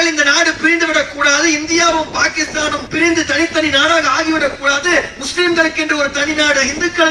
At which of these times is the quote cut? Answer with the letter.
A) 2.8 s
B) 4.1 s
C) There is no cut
A